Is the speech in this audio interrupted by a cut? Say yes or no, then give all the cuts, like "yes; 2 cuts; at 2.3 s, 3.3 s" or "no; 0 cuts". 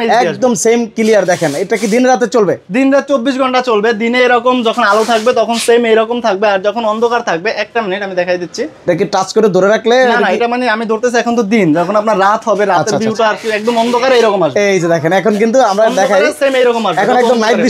no; 0 cuts